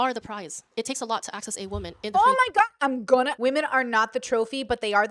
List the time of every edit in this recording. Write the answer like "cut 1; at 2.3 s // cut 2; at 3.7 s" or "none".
cut 1; at 3.3 s